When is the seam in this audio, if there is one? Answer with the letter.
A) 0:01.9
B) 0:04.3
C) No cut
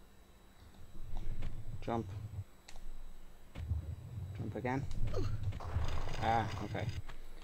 C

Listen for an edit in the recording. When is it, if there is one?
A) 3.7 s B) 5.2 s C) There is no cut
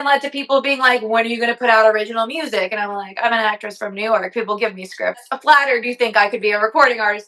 B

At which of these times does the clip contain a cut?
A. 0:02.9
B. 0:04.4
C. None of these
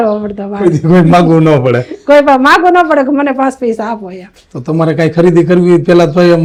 C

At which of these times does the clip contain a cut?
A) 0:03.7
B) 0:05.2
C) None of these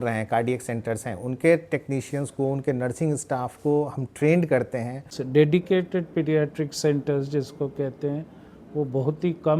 B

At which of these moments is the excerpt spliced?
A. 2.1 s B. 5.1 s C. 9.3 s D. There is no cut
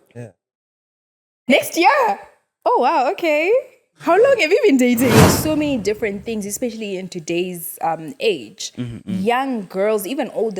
B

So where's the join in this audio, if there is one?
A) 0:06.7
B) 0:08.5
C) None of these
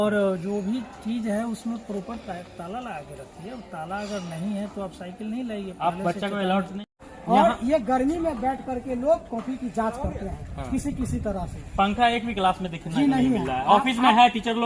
A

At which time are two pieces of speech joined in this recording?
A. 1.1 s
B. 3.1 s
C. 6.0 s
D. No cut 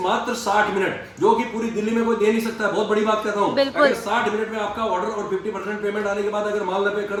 D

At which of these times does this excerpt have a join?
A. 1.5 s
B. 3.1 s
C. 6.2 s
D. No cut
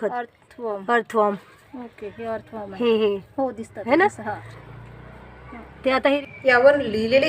C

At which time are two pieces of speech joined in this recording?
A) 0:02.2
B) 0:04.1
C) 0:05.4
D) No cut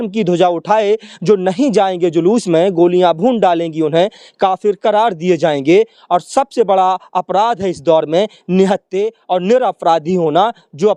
D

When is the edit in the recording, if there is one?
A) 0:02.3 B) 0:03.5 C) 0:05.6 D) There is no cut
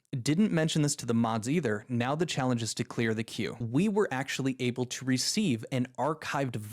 B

